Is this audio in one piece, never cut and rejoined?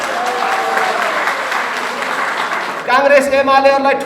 no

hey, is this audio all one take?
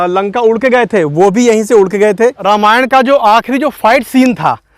no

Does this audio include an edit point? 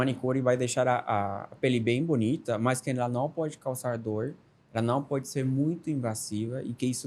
no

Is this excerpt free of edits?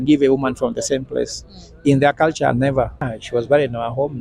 no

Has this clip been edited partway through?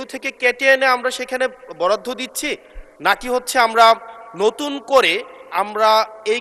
no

